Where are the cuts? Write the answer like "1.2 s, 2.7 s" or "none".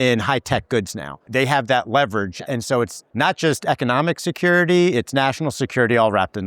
1.2 s, 3.0 s